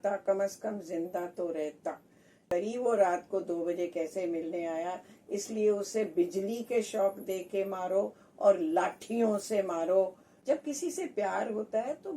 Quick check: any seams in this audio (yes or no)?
yes